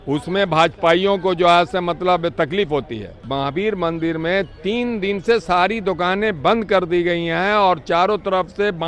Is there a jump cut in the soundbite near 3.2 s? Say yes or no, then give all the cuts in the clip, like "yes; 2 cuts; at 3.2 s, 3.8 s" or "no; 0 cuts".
yes; 1 cut; at 3.2 s